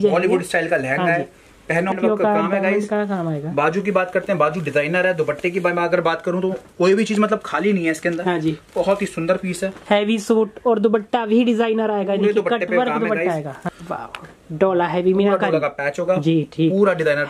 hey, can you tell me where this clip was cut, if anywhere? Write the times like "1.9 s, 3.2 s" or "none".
2.0 s, 13.6 s